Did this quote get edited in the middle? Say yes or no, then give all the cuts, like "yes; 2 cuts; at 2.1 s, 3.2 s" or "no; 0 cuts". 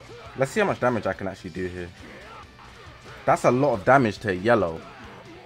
no; 0 cuts